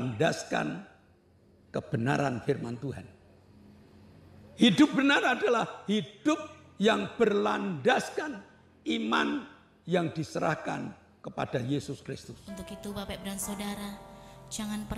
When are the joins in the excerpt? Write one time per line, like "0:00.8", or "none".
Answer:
0:12.3